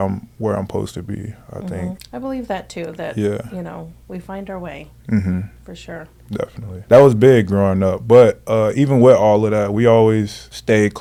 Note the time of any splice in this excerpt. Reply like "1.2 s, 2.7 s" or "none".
none

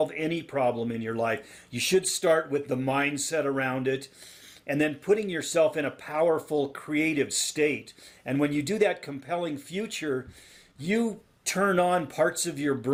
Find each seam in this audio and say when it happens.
none

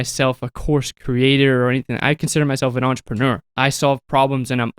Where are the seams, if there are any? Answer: 3.5 s

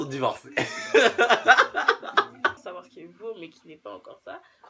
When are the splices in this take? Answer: 2.6 s

